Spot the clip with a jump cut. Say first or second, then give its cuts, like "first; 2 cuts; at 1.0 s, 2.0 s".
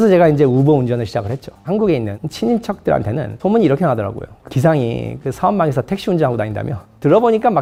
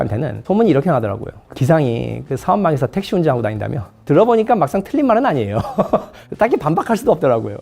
second; 1 cut; at 6.2 s